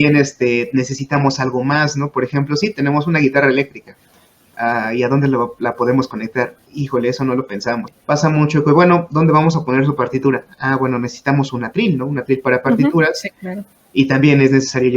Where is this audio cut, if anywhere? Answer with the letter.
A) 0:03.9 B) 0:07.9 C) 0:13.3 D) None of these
B